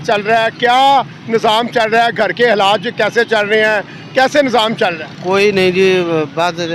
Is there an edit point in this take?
no; 0 cuts

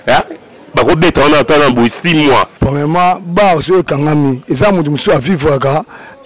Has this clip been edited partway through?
yes; 1 cut; at 2.5 s

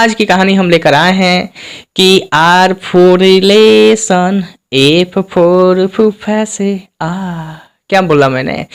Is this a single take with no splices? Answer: yes; 0 cuts

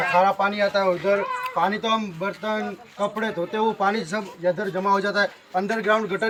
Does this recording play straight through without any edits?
yes; 0 cuts

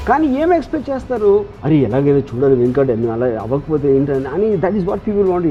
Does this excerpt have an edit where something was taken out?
no; 0 cuts

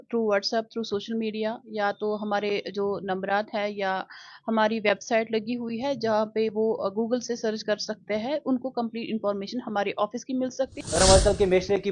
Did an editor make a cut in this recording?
yes; 1 cut; at 10.8 s

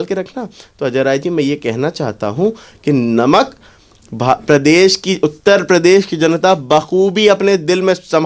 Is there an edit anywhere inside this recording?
no; 0 cuts

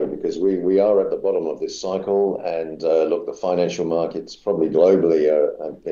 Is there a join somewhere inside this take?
no; 0 cuts

